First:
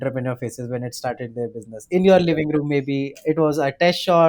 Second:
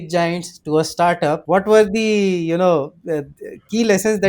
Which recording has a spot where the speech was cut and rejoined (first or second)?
second